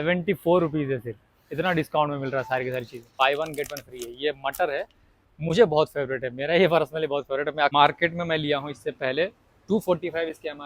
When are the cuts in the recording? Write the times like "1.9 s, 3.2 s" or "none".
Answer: 3.1 s, 7.7 s